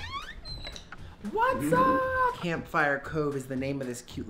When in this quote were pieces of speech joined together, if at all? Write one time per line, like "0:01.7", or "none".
0:02.4